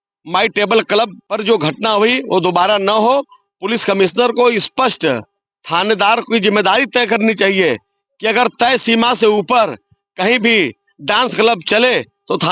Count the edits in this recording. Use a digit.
1